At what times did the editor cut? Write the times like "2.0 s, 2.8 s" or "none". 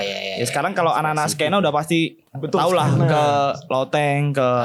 none